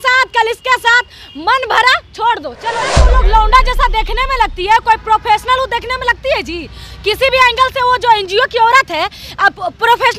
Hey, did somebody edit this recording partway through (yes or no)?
yes